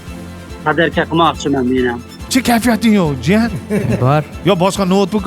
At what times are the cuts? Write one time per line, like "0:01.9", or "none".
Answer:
0:02.1